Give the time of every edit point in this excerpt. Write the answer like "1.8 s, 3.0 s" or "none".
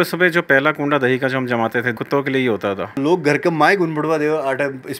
1.9 s, 3.0 s